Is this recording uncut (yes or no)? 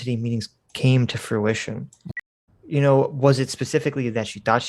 no